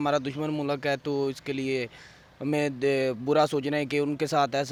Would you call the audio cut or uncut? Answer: uncut